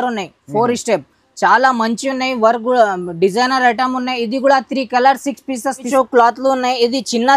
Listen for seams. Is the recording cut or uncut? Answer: cut